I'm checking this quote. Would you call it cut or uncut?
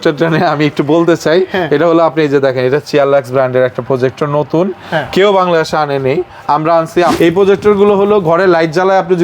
cut